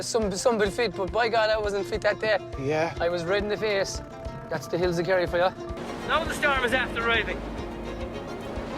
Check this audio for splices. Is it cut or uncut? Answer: cut